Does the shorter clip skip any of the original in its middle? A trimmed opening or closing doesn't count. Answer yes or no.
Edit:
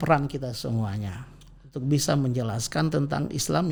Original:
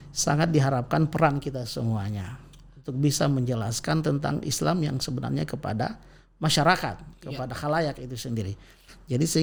no